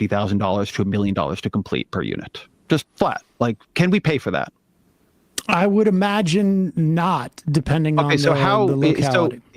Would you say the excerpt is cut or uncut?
cut